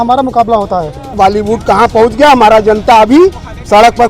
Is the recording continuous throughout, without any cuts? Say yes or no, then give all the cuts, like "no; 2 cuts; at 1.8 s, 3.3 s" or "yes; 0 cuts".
no; 1 cut; at 1.1 s